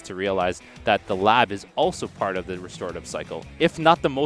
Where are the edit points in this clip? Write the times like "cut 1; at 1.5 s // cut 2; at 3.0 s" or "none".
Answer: none